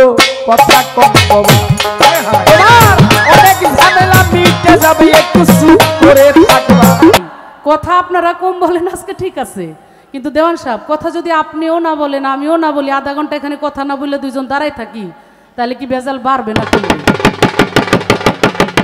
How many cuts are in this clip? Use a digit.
1